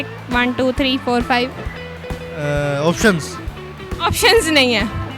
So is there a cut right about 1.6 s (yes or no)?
no